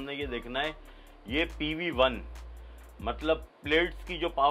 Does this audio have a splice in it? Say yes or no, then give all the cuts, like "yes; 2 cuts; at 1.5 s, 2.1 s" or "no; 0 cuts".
no; 0 cuts